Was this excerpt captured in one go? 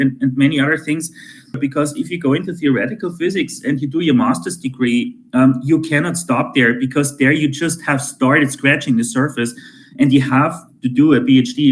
no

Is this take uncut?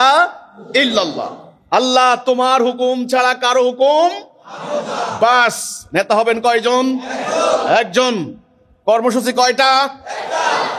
yes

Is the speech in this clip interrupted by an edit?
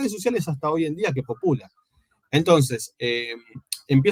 no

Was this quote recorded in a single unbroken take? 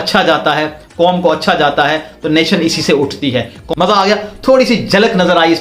no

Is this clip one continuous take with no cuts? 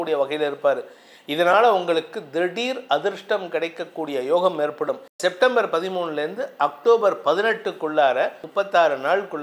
no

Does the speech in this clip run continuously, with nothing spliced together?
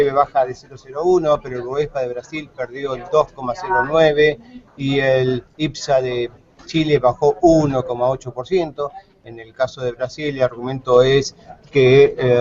yes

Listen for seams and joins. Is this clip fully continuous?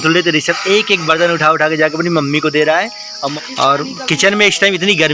no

